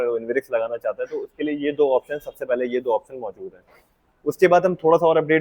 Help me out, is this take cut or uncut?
uncut